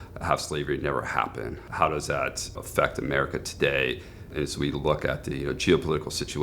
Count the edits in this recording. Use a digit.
3